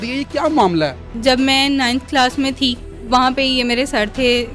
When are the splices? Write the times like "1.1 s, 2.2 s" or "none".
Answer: 1.1 s, 3.0 s